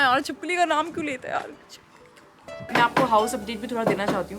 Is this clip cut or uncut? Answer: cut